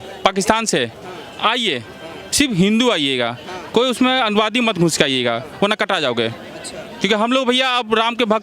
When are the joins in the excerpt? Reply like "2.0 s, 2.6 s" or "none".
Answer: none